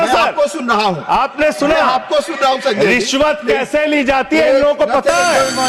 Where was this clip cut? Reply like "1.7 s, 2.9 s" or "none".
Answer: none